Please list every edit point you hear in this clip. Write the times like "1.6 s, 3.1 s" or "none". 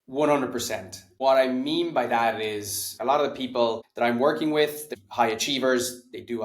1.0 s, 3.0 s, 3.9 s, 4.8 s